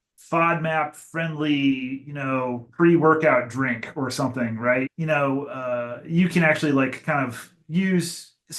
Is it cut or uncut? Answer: cut